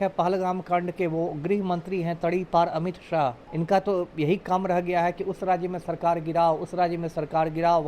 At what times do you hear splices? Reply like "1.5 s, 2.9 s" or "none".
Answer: 3.5 s